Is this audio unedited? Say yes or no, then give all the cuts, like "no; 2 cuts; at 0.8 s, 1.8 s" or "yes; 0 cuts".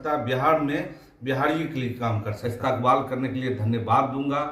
no; 1 cut; at 2.3 s